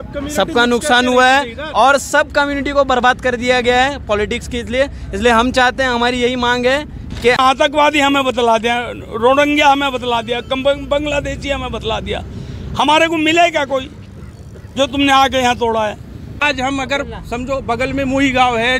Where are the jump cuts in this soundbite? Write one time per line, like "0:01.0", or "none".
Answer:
0:07.4
0:16.4